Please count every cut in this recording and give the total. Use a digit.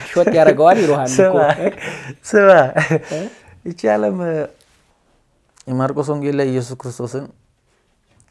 0